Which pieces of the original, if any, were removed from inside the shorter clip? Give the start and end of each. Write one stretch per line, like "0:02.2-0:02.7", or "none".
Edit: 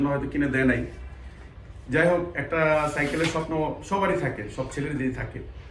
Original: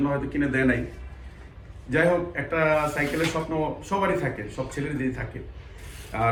none

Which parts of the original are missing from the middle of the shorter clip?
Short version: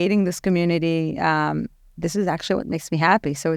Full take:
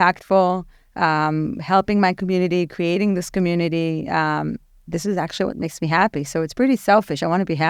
none

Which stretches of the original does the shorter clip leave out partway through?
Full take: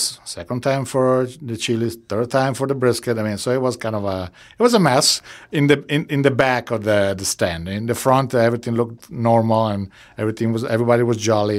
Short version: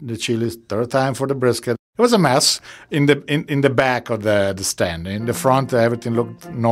0:03.2-0:04.4

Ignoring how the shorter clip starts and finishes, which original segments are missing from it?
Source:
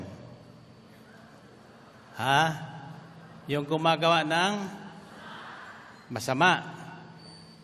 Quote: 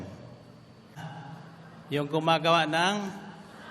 0:01.0-0:02.6

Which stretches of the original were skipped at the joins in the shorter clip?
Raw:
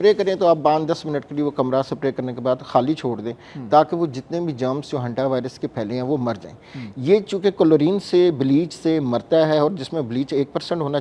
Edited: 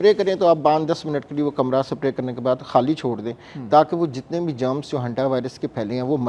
none

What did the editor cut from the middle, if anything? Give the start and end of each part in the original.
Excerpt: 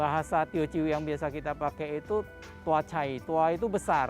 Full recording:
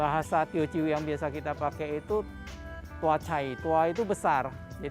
0:02.4-0:02.8

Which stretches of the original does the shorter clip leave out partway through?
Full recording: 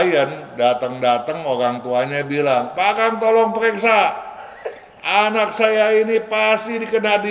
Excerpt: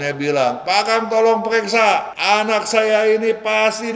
0:04.2-0:05.0

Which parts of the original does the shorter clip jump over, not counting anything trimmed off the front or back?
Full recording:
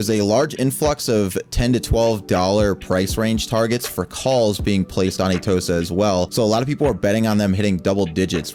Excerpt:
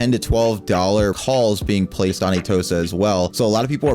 0:02.8-0:04.2

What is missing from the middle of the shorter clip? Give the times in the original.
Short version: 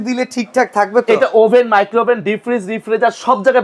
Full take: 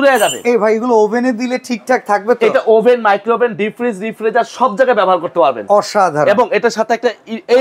none

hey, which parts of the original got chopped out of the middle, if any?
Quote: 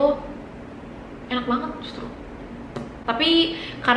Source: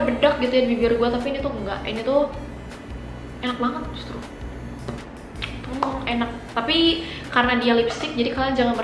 0:05.1-0:06.4

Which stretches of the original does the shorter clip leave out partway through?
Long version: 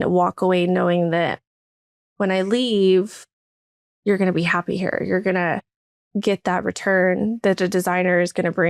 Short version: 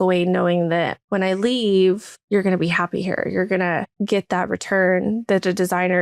0:01.4-0:02.1
0:03.2-0:03.9
0:05.6-0:06.0

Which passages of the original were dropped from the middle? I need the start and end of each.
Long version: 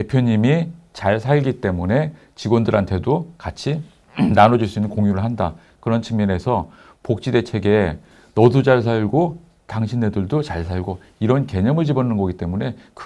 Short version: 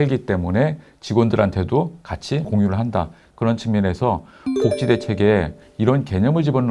0:03.8-0:04.9
0:08.1-0:11.0

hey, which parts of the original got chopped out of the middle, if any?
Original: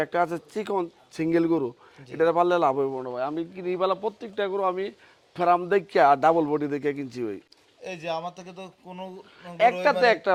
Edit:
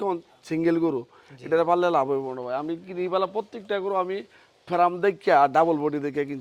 none

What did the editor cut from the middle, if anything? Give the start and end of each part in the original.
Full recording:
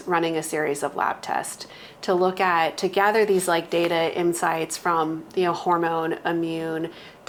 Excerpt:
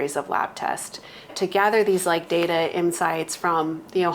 0:02.0-0:02.7

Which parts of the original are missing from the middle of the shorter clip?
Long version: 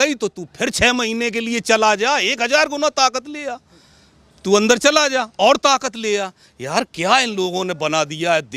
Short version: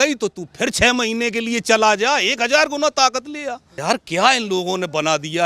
0:03.7-0:06.5

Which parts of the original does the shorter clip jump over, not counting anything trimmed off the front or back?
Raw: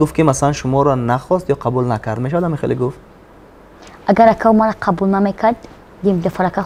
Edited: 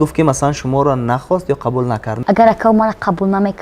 0:02.1-0:03.9

